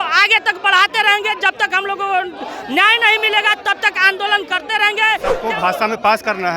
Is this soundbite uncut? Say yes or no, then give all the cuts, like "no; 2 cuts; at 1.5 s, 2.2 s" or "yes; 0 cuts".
no; 1 cut; at 5.3 s